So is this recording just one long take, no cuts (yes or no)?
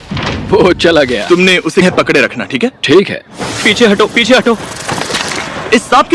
no